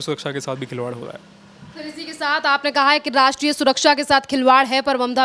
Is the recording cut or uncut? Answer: uncut